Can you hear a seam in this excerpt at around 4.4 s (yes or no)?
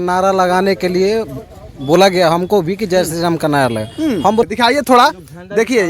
yes